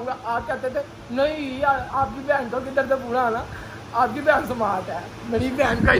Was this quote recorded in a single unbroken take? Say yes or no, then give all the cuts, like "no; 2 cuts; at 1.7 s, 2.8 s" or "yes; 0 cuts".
yes; 0 cuts